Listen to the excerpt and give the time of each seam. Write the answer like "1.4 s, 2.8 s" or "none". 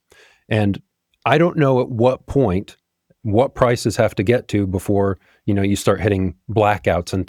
none